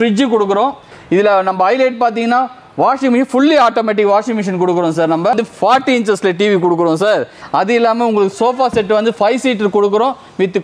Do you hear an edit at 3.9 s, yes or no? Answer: no